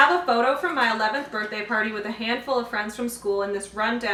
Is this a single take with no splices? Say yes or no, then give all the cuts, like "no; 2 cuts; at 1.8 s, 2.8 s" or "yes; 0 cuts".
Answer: yes; 0 cuts